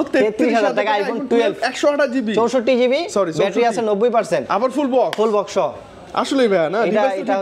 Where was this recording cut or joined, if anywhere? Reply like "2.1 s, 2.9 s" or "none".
none